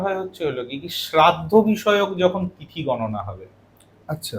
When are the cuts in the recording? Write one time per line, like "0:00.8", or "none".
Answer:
none